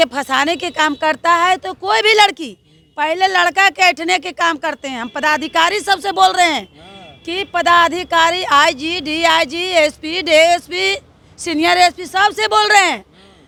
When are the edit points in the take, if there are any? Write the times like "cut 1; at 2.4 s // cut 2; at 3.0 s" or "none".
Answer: none